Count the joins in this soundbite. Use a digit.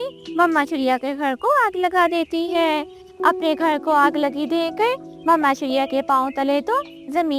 1